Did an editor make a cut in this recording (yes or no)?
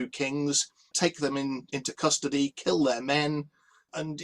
yes